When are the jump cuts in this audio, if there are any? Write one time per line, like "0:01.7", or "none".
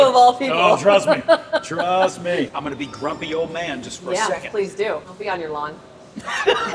0:02.5
0:05.1